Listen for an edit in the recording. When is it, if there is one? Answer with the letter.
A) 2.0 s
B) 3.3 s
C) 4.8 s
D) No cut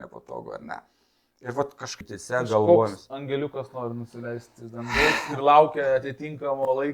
A